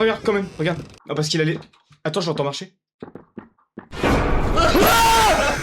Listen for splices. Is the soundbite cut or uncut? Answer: uncut